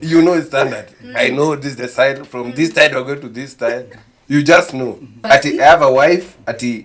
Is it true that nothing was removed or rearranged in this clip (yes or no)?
no